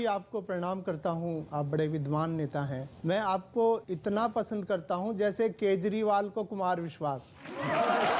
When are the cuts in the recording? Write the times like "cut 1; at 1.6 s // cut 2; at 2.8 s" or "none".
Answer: cut 1; at 1.5 s // cut 2; at 2.9 s // cut 3; at 3.9 s